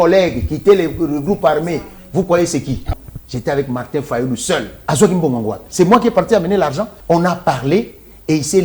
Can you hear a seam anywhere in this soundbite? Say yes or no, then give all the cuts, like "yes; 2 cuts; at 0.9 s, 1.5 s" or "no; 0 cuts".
yes; 3 cuts; at 2.9 s, 4.7 s, 6.9 s